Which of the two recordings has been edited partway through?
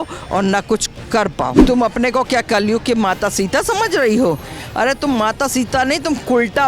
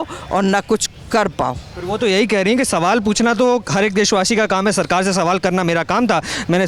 first; 1 cut; at 1.6 s

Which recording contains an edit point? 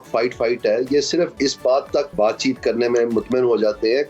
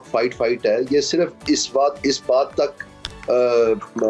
first; 2 cuts; at 1.3 s, 2.1 s

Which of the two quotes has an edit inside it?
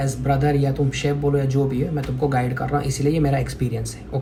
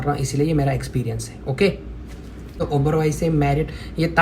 second; 1 cut; at 2.5 s

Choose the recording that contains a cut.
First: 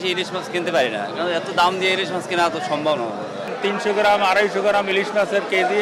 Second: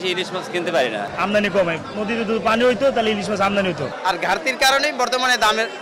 second; 2 cuts; at 1.1 s, 3.9 s

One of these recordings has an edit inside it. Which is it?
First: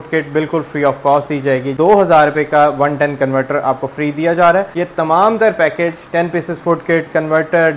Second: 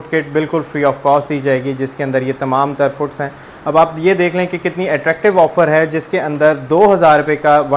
first; 2 cuts; at 1.7 s, 4.7 s

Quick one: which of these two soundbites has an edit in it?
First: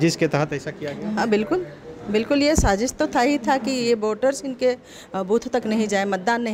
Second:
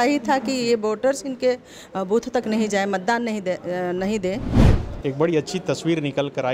second; 1 cut; at 4.6 s

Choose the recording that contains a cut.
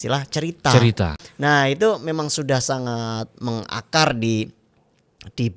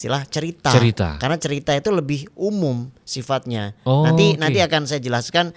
first; 1 cut; at 1.2 s

